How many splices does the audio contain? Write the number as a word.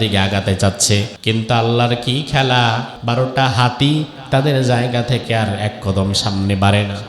two